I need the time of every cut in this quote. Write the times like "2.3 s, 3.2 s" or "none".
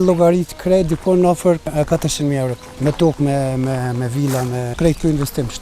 1.7 s, 2.7 s, 4.7 s